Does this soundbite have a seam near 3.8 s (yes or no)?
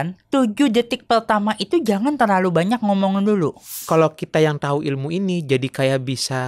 yes